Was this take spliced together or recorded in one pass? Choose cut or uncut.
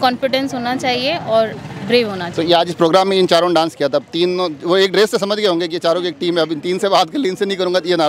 uncut